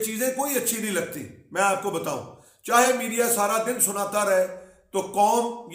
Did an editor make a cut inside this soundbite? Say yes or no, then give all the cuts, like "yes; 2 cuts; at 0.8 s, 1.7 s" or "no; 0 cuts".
no; 0 cuts